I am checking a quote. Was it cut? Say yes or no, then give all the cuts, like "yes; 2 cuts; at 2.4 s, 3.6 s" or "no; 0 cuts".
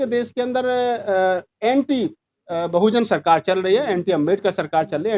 no; 0 cuts